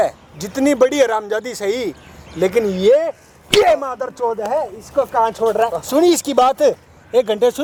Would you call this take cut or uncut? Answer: uncut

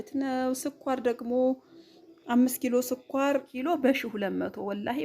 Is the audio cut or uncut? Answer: cut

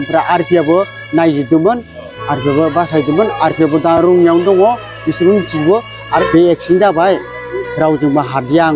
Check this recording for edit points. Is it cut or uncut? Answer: cut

